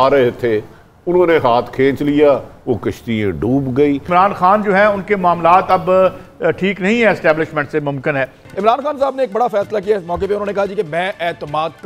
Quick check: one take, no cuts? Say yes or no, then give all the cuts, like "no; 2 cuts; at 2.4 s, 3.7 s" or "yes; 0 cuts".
no; 2 cuts; at 4.1 s, 8.4 s